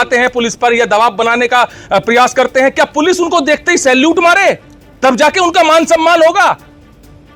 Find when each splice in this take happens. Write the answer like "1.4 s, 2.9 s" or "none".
none